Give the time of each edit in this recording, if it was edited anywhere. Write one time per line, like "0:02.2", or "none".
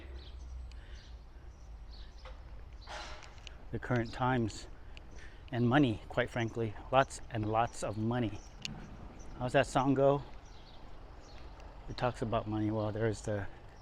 none